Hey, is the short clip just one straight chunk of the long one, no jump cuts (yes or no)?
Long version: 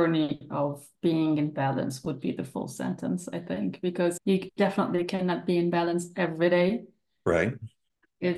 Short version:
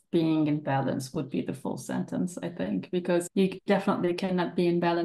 yes